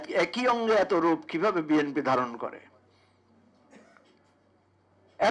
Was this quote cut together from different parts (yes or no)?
no